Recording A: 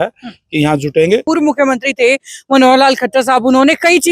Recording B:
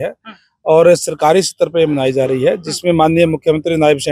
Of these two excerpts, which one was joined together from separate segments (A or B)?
A